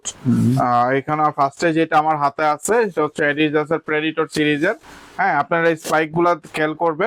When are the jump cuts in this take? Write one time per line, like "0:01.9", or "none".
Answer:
none